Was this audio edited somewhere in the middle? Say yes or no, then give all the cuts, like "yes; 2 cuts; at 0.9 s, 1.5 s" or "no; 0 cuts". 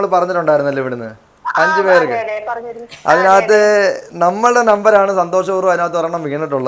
no; 0 cuts